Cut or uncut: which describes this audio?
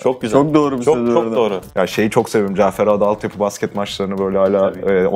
cut